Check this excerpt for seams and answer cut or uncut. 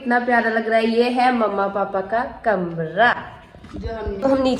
uncut